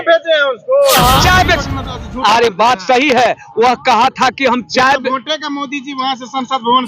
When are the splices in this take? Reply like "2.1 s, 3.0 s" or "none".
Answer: 1.2 s